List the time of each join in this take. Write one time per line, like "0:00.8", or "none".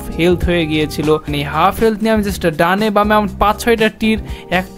0:01.4